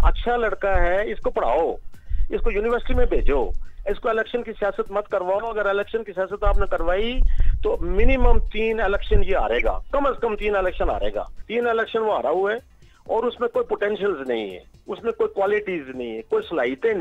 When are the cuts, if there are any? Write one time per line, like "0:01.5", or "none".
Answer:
0:11.4